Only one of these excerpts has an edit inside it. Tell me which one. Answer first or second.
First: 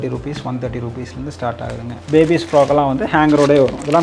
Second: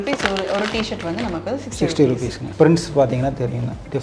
second